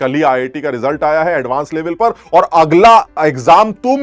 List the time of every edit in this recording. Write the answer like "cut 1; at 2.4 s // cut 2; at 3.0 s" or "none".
none